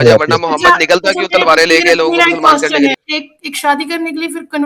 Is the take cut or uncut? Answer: cut